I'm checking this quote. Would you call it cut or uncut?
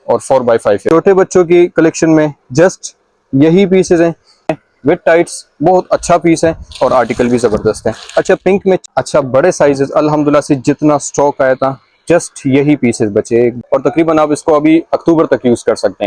cut